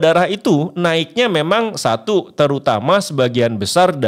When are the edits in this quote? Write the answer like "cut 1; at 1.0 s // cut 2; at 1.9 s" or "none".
none